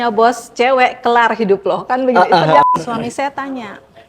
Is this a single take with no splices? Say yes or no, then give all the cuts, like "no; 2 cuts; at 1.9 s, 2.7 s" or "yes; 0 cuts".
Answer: no; 1 cut; at 2.6 s